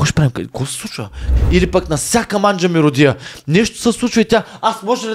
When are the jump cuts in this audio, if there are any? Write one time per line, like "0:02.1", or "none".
0:01.3